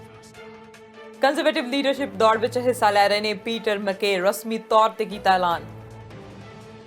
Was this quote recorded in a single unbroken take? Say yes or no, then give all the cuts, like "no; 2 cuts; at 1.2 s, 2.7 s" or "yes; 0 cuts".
no; 1 cut; at 1.0 s